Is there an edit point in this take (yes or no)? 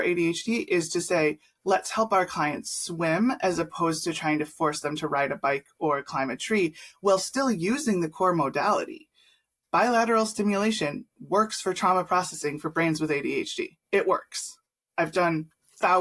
no